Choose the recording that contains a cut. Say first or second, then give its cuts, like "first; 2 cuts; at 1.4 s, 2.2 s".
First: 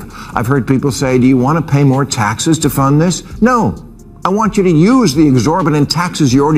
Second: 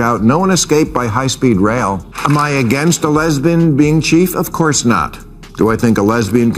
second; 1 cut; at 2.1 s